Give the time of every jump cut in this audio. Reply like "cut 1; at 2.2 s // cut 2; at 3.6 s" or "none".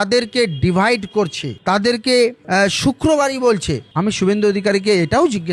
cut 1; at 3.8 s